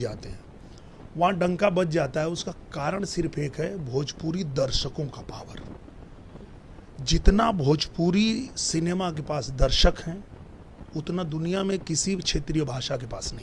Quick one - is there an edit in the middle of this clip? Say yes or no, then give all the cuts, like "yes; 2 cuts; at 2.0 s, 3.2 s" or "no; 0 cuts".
no; 0 cuts